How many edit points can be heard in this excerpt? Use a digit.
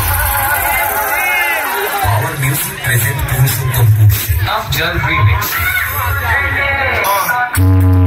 0